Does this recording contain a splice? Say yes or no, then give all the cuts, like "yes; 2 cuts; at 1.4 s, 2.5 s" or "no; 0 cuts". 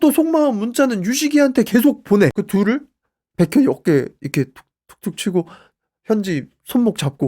yes; 1 cut; at 2.3 s